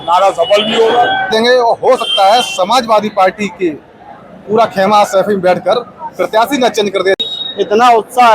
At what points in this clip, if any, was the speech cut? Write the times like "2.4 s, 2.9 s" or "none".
1.3 s, 7.2 s